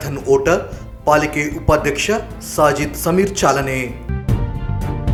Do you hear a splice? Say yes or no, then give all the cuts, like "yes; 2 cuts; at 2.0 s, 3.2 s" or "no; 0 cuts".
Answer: no; 0 cuts